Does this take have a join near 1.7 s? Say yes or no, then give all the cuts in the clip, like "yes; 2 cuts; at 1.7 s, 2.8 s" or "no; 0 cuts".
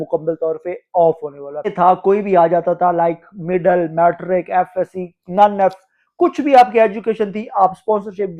yes; 1 cut; at 1.7 s